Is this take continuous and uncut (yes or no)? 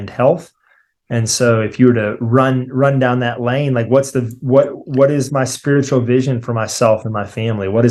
yes